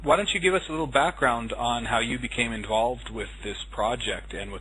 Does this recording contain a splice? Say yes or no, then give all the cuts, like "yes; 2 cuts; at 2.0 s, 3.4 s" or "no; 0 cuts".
no; 0 cuts